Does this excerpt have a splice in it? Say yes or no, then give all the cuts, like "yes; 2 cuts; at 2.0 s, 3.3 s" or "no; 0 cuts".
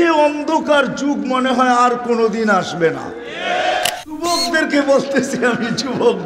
yes; 1 cut; at 3.8 s